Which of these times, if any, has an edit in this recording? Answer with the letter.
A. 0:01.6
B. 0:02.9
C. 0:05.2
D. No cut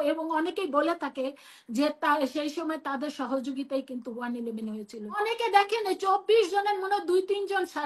C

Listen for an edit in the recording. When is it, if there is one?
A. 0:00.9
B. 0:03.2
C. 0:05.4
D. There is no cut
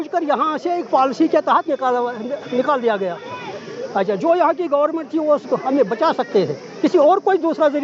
D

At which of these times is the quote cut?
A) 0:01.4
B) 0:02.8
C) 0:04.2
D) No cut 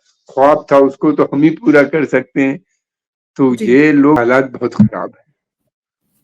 C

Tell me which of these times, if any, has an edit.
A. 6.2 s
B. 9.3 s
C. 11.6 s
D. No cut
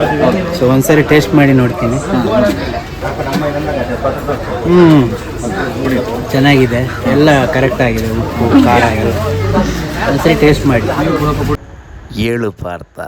C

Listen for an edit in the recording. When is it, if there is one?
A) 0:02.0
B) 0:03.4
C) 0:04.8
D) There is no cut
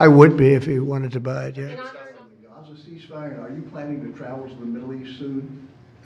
A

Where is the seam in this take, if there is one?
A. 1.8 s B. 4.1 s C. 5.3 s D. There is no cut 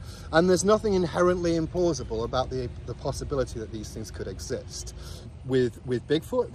C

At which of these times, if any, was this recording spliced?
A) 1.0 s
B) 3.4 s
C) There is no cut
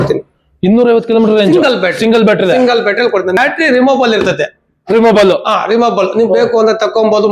B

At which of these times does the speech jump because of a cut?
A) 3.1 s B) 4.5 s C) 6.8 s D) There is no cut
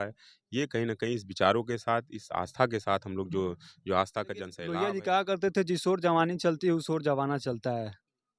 B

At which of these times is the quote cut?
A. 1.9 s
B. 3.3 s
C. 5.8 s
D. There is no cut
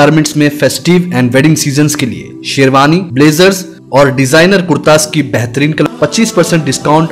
C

